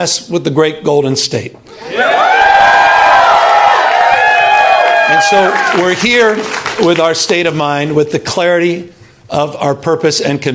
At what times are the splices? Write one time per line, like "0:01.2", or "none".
none